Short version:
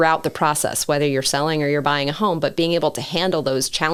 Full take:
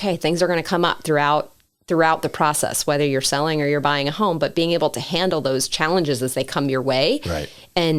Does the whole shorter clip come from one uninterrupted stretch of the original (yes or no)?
yes